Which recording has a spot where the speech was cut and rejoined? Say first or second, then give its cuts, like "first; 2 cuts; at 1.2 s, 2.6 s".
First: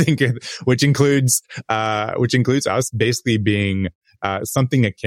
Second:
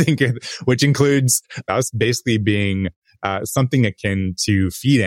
second; 1 cut; at 1.7 s